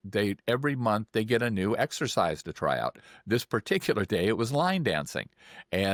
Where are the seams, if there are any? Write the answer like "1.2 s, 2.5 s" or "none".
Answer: none